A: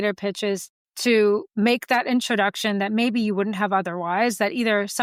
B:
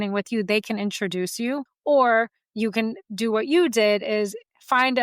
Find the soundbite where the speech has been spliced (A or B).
B